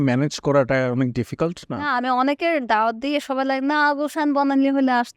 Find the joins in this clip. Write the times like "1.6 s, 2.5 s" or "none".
1.9 s